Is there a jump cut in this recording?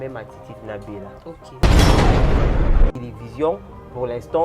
yes; 2 cuts; at 1.5 s, 3.1 s

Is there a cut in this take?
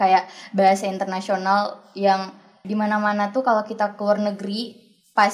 yes; 1 cut; at 2.6 s

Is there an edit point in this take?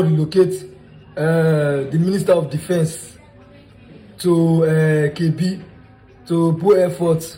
no; 0 cuts

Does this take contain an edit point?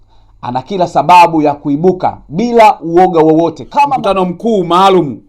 yes; 1 cut; at 3.9 s

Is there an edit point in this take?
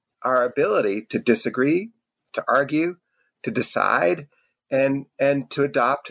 no; 0 cuts

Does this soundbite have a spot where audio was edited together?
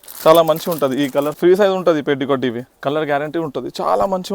yes; 2 cuts; at 1.3 s, 2.7 s

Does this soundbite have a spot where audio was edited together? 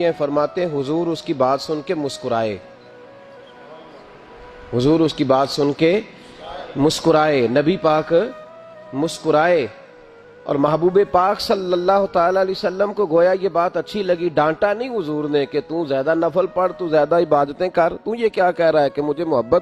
no; 0 cuts

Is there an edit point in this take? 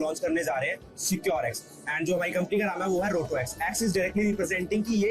no; 0 cuts

